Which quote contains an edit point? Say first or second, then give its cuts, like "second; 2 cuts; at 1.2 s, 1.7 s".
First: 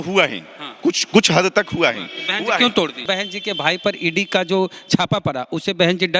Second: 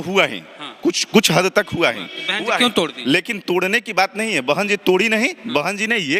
first; 1 cut; at 3.0 s